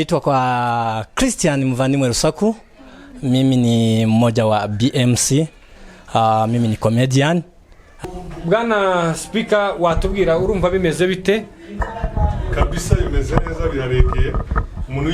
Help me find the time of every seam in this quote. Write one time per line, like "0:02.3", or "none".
0:08.0